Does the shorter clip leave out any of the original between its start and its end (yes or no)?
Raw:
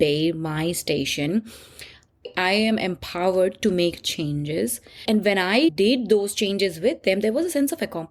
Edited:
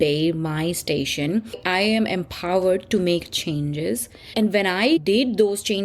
yes